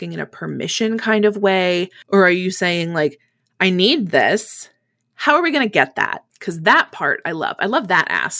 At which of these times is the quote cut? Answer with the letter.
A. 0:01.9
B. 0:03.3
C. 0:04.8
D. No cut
A